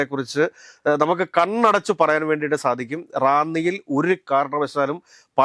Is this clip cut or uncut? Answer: uncut